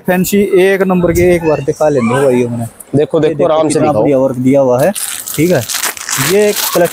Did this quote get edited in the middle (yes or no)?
no